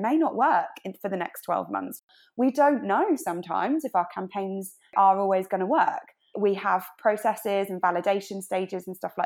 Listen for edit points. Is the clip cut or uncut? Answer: cut